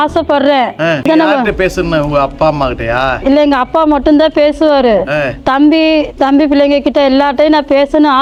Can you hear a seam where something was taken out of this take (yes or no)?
no